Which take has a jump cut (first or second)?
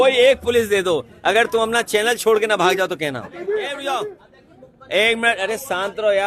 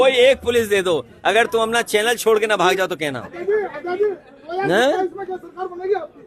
first